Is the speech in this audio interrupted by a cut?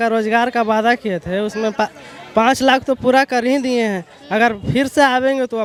no; 0 cuts

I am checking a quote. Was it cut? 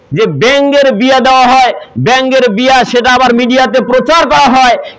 no; 0 cuts

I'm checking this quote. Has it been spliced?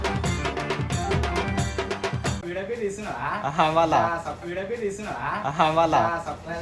no; 0 cuts

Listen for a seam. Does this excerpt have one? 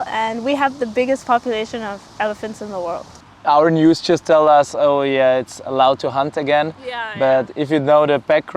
yes; 1 cut; at 3.2 s

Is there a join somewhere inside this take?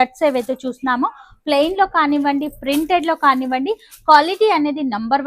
no; 0 cuts

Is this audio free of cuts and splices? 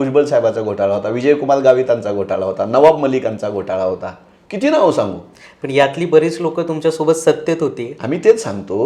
yes; 0 cuts

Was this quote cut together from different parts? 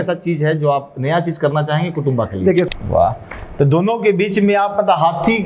yes; 1 cut; at 2.7 s

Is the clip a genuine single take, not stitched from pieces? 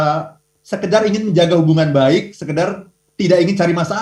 yes; 0 cuts

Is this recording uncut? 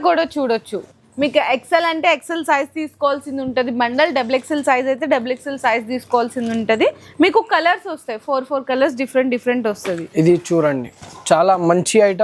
yes; 0 cuts

